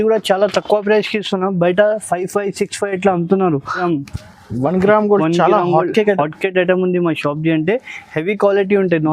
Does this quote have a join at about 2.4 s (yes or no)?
no